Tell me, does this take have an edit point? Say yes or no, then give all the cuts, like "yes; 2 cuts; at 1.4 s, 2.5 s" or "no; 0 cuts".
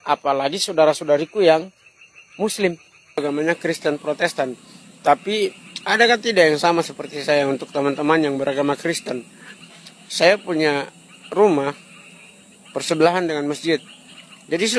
yes; 1 cut; at 3.2 s